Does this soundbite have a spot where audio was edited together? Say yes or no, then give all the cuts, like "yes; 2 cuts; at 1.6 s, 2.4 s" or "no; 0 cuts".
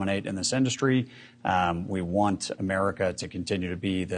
no; 0 cuts